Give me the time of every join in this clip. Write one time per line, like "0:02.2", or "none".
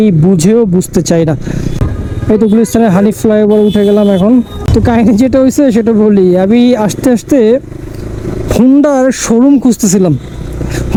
none